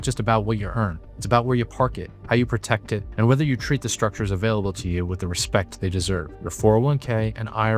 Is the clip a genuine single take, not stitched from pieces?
yes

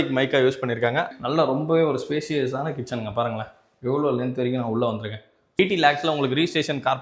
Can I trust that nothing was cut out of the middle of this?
no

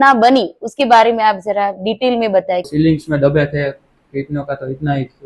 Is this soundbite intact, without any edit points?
no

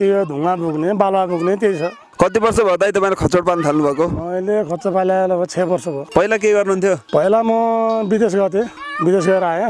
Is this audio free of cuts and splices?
no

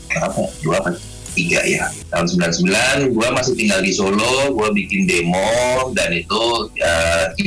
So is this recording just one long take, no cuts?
no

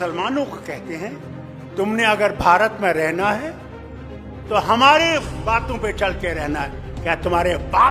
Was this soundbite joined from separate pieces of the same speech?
no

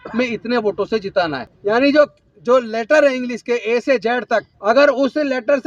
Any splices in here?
yes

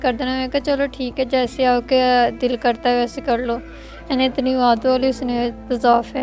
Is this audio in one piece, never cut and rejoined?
yes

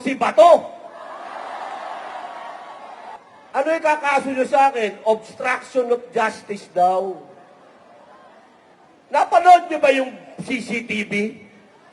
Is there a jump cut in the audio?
yes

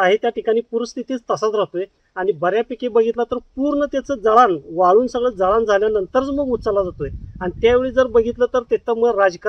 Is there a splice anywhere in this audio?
no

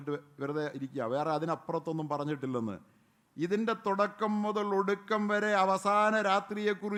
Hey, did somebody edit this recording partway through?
no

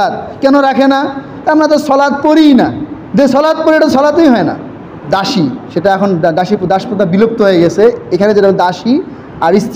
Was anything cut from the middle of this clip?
yes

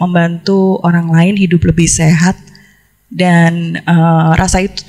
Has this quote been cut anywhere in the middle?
no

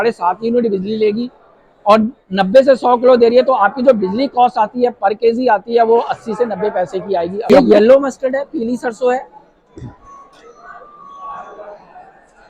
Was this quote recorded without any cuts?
no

